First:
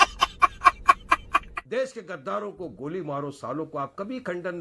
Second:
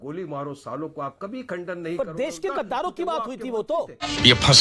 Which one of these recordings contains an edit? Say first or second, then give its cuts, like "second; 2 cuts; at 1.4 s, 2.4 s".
first; 1 cut; at 1.6 s